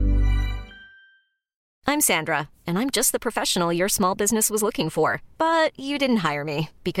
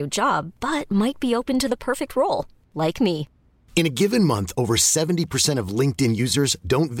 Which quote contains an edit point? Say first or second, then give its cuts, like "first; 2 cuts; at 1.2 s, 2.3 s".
first; 1 cut; at 1.6 s